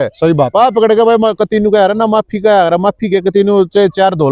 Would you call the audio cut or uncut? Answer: uncut